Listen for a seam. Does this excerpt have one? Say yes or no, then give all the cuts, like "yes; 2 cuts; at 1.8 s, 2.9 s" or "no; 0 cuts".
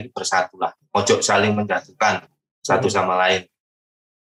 no; 0 cuts